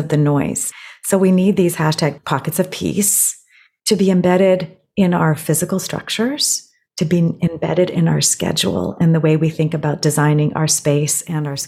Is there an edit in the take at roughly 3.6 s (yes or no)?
no